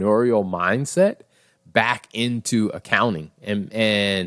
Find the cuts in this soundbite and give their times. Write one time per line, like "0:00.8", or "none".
none